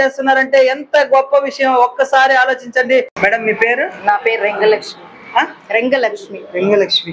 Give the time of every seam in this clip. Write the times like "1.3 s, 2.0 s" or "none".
none